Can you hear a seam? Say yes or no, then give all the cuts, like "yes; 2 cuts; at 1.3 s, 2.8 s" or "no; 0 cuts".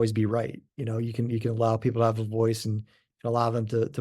no; 0 cuts